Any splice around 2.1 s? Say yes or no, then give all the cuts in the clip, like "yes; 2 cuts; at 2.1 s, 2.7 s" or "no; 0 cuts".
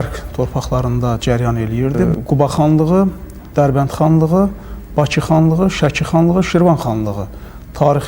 yes; 1 cut; at 2.1 s